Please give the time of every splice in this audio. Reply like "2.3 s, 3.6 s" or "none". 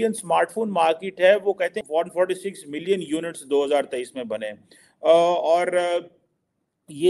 1.8 s